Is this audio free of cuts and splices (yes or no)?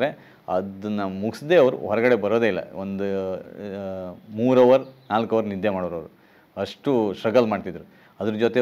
yes